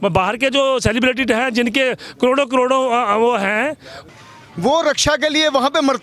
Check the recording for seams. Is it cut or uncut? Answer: cut